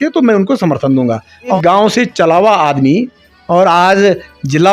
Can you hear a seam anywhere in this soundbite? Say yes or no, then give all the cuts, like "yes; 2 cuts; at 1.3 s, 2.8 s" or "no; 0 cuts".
yes; 1 cut; at 1.6 s